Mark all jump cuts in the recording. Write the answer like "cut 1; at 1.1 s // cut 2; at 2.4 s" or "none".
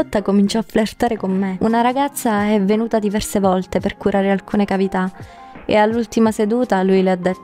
cut 1; at 1.5 s